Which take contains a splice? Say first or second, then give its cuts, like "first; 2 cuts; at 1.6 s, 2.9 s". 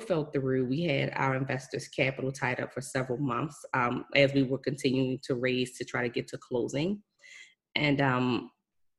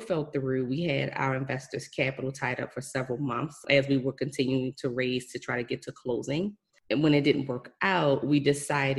second; 2 cuts; at 3.6 s, 6.7 s